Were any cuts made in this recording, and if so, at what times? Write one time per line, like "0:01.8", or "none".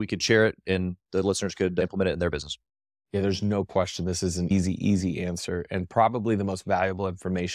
0:04.5